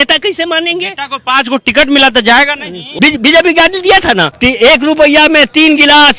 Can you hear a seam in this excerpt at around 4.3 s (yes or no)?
yes